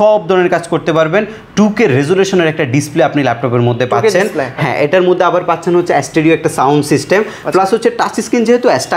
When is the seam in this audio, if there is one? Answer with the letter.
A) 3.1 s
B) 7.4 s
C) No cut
C